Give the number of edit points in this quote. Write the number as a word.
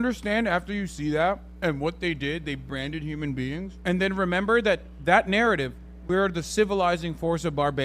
two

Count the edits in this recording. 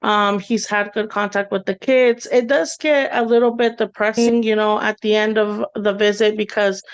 one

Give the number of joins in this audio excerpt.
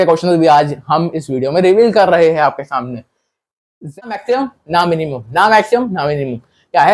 one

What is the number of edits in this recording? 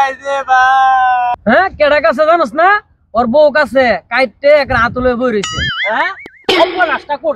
one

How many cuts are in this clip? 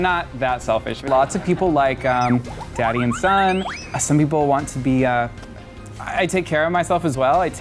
one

